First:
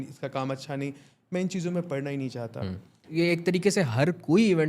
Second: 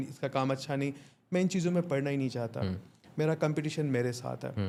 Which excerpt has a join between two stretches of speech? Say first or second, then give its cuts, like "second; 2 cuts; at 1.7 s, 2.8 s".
first; 1 cut; at 3.1 s